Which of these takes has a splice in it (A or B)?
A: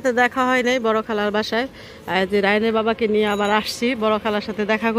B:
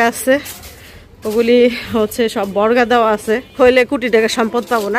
B